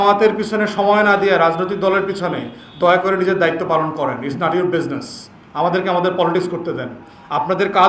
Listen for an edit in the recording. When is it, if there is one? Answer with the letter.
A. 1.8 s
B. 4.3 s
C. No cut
B